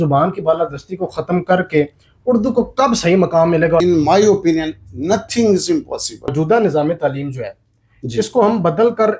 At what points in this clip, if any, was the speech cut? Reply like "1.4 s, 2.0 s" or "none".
3.8 s, 6.3 s